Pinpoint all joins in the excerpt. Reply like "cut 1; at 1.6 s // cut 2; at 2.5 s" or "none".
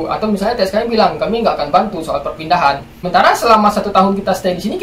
cut 1; at 2.9 s